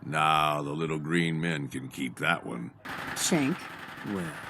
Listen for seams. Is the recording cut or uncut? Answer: cut